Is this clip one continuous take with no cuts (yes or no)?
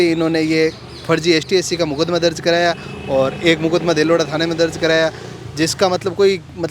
yes